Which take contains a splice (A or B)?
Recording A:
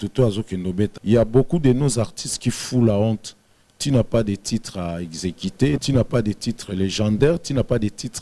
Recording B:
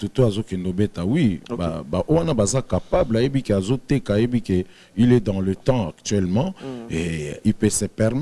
A